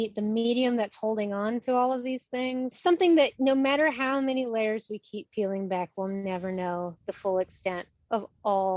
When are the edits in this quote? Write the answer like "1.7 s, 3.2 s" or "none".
2.7 s